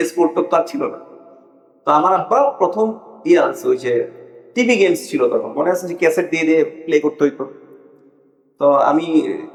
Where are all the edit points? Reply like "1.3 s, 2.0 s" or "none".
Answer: none